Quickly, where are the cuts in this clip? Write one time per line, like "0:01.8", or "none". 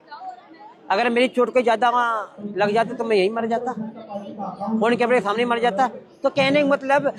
none